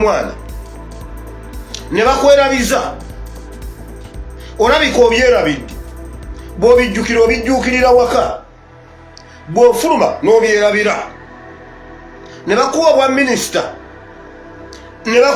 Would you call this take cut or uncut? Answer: uncut